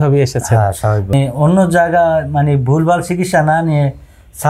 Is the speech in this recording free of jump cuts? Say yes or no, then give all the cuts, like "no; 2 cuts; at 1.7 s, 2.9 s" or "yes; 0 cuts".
no; 1 cut; at 1.1 s